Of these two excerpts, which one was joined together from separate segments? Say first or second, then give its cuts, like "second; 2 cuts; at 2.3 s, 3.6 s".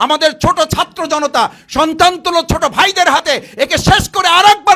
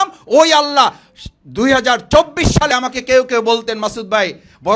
second; 1 cut; at 2.7 s